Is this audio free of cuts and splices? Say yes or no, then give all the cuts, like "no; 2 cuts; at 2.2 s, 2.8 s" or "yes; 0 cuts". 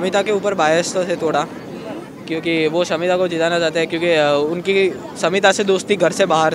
yes; 0 cuts